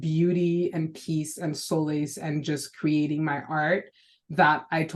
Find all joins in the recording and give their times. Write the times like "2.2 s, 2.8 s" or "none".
none